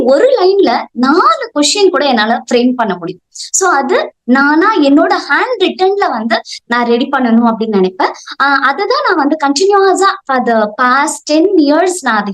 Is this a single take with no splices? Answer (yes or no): yes